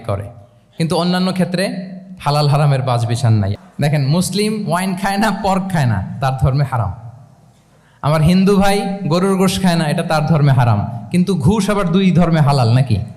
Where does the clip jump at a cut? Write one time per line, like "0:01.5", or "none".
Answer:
0:03.5